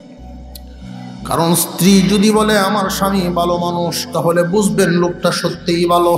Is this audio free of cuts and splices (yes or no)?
no